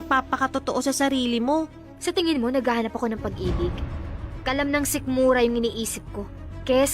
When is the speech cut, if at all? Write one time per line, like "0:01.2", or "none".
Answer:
0:01.8